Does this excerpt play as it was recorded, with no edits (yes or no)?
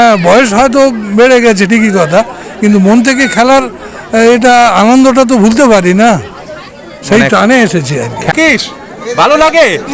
no